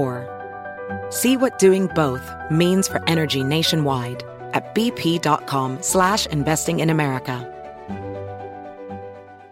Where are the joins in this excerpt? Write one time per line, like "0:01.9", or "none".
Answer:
none